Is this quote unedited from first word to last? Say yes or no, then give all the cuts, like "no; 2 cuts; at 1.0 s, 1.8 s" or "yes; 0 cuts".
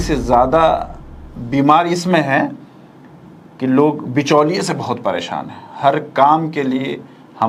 yes; 0 cuts